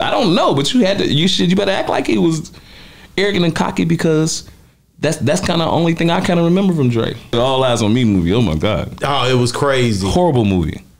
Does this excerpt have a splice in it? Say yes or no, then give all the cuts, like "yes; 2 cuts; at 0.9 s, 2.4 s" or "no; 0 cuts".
yes; 1 cut; at 7.3 s